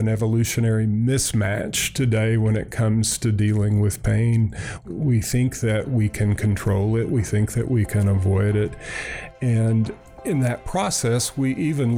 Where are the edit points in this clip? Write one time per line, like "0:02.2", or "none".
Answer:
0:04.8
0:10.1

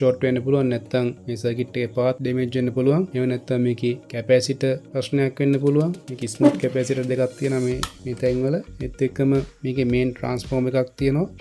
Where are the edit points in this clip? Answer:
0:02.2
0:03.1
0:04.1
0:04.9

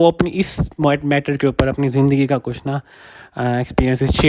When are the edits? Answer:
none

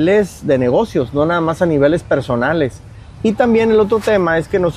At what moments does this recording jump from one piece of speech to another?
none

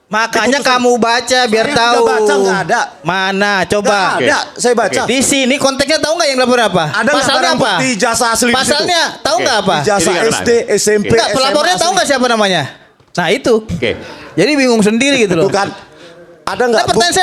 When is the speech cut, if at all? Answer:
none

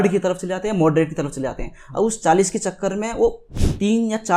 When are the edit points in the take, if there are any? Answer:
0:03.5

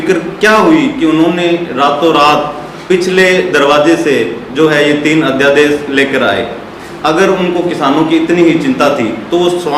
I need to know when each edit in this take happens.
none

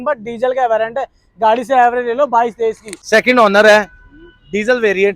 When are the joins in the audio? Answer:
0:02.9

